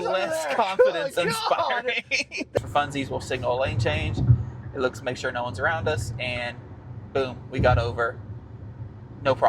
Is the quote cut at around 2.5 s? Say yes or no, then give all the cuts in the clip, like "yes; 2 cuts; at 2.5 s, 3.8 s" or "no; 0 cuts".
yes; 1 cut; at 2.5 s